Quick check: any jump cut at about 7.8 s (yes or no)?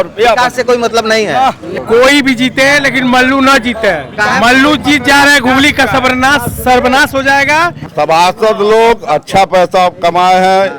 yes